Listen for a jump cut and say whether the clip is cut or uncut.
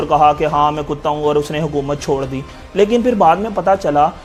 uncut